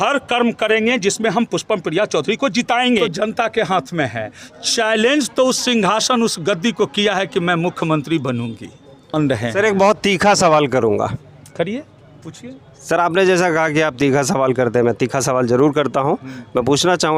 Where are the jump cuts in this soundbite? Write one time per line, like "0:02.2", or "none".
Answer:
0:03.0
0:09.1